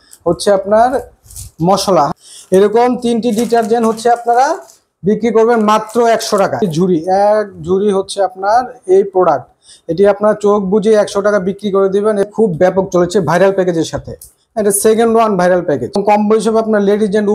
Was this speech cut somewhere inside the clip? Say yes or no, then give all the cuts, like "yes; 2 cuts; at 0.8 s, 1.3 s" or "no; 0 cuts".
yes; 4 cuts; at 2.1 s, 6.6 s, 12.2 s, 16.0 s